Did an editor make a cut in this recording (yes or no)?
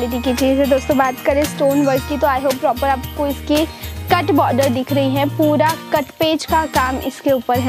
no